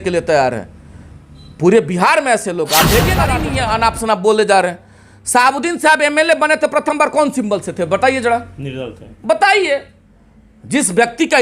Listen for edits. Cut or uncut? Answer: cut